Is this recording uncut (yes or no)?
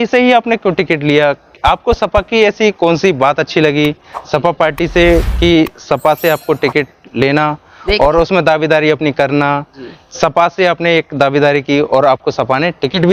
yes